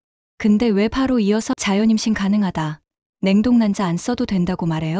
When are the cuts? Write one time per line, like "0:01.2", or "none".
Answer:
0:01.5